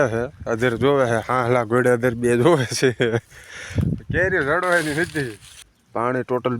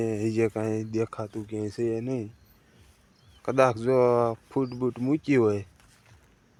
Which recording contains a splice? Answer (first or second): first